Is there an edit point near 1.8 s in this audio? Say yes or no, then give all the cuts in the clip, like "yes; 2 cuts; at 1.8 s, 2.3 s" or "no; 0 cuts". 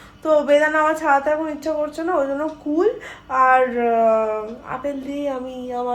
no; 0 cuts